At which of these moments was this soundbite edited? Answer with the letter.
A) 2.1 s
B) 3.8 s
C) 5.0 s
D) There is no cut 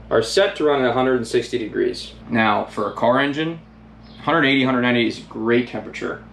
A